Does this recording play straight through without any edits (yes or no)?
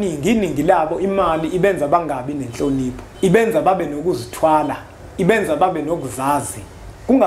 no